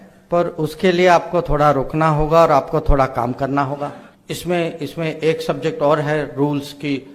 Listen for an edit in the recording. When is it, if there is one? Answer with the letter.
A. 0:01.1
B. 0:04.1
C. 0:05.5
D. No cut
B